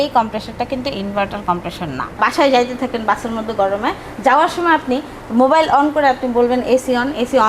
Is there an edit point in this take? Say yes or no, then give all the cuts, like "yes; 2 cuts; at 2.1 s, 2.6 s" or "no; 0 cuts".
yes; 1 cut; at 2.2 s